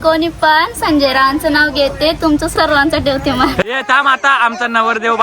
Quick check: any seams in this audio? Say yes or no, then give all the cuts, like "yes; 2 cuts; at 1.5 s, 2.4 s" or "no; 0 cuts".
yes; 1 cut; at 3.6 s